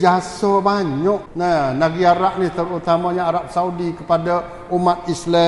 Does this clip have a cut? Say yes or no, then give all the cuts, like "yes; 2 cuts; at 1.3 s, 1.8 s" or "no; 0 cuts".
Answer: yes; 1 cut; at 1.3 s